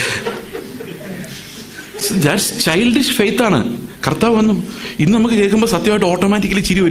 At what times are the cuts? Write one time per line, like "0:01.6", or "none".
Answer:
none

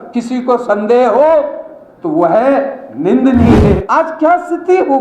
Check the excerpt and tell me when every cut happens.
0:03.8

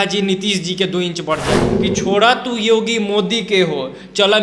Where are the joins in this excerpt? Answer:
0:01.8

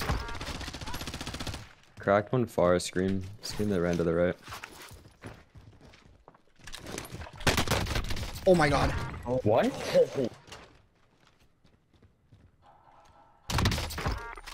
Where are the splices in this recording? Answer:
0:10.3

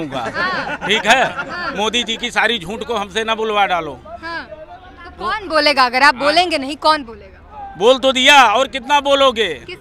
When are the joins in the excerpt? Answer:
none

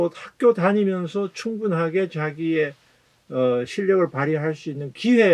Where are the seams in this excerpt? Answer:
none

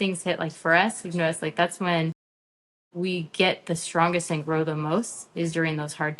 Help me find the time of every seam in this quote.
none

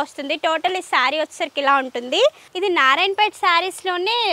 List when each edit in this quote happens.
0:02.5

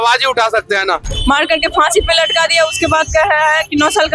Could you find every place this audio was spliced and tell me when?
0:01.1

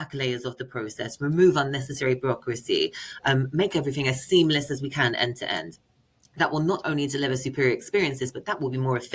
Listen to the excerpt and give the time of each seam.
none

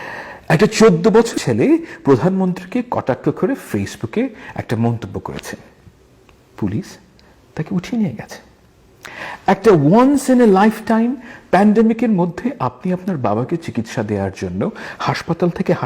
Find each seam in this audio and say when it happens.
0:01.4

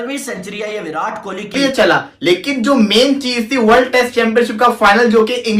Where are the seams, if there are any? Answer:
0:01.6

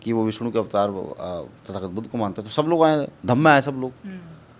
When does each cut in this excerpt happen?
none

